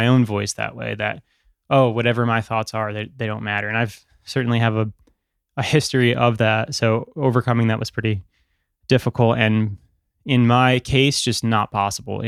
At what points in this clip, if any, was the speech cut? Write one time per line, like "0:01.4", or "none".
none

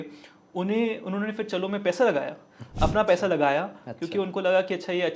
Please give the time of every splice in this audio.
none

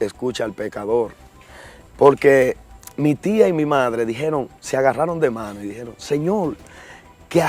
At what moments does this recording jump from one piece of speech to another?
none

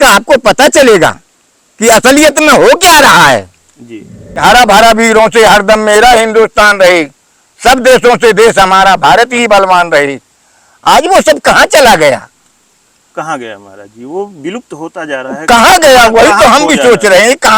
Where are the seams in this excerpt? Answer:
0:04.4

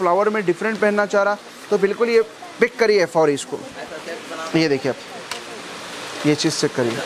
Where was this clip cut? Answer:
none

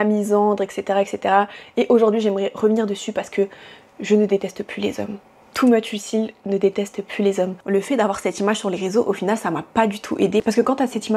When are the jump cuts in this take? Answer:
0:07.7

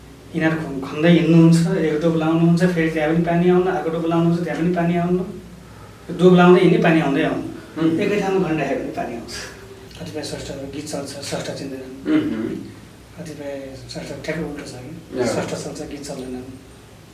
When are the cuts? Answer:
0:09.8

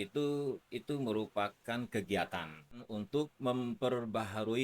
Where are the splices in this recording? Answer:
0:02.9

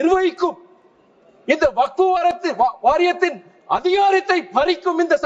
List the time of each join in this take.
none

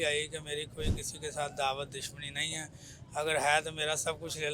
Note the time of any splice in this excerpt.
none

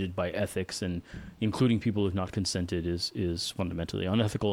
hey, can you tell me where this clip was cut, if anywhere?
none

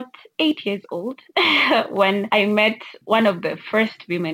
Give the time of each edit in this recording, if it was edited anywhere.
0:01.2
0:02.3

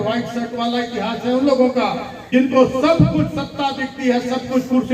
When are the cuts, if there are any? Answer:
0:02.1

